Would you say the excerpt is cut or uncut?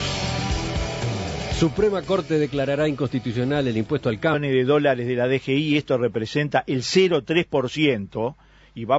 uncut